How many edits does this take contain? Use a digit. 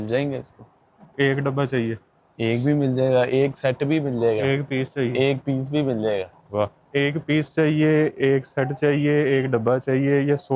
0